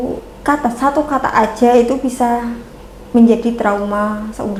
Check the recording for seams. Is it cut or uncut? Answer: uncut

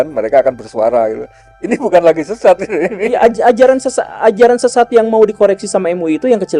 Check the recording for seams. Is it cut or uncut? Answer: uncut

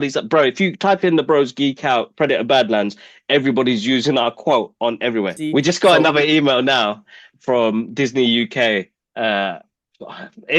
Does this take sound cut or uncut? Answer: cut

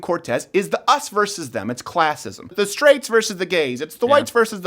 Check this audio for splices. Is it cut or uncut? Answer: cut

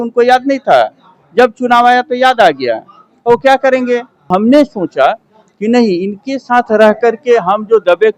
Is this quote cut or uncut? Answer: cut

